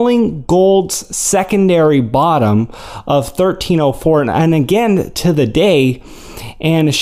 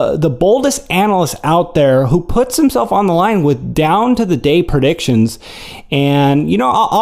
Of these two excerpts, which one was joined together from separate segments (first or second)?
second